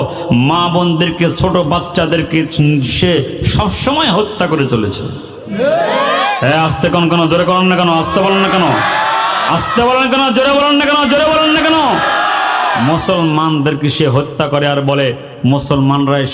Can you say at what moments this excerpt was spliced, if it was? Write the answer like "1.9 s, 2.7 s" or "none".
none